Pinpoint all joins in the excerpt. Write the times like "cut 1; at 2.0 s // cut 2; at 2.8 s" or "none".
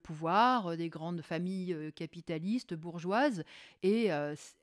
none